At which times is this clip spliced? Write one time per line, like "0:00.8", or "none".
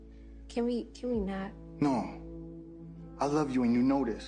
none